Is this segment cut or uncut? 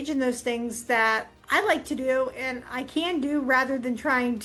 uncut